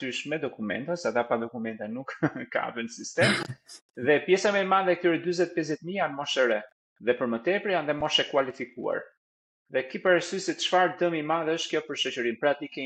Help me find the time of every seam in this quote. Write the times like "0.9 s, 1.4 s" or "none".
none